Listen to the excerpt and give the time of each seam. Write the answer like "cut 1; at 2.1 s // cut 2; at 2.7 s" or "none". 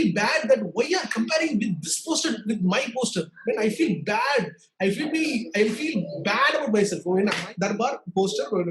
cut 1; at 7.4 s